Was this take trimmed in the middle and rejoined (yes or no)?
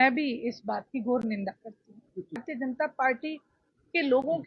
yes